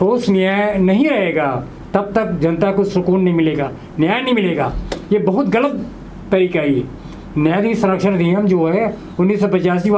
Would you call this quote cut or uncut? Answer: uncut